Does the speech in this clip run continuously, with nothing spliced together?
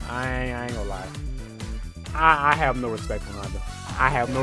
yes; 0 cuts

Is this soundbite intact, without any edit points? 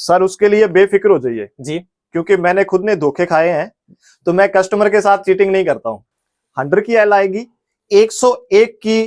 yes; 0 cuts

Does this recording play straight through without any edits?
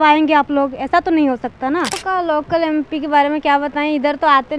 no; 1 cut; at 2.0 s

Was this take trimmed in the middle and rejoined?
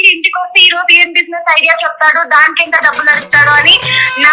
no; 0 cuts

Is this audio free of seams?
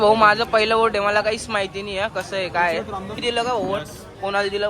no; 1 cut; at 3.2 s

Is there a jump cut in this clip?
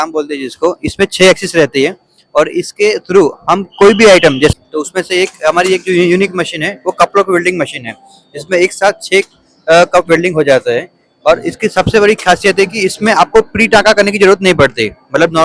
yes; 1 cut; at 4.5 s

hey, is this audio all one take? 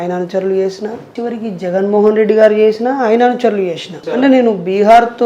no; 2 cuts; at 1.0 s, 4.0 s

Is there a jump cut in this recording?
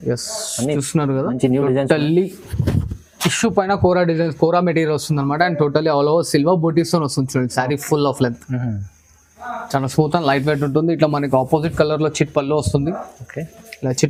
no; 0 cuts

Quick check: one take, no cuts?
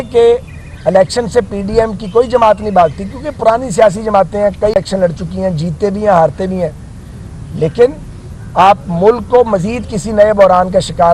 yes; 0 cuts

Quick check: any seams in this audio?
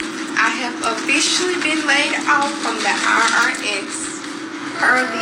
no; 0 cuts

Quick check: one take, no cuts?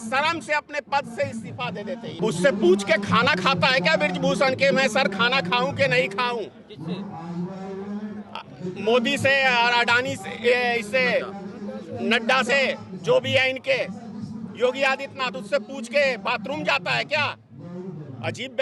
no; 1 cut; at 2.2 s

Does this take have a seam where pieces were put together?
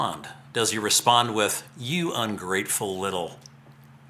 no; 0 cuts

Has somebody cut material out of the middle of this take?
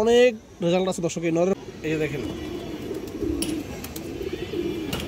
yes; 1 cut; at 1.6 s

